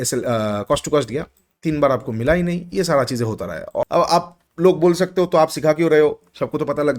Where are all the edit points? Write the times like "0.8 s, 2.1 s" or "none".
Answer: 3.8 s